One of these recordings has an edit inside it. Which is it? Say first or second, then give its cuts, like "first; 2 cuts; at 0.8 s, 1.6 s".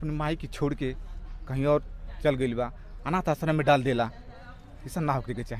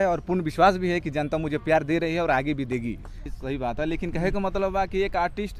second; 1 cut; at 3.3 s